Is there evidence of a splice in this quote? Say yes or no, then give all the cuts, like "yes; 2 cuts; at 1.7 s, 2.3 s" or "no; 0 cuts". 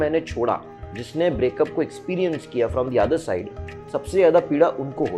no; 0 cuts